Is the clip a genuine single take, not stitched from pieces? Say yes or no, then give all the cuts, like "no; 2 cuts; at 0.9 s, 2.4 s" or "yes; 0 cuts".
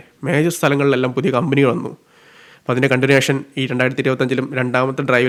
yes; 0 cuts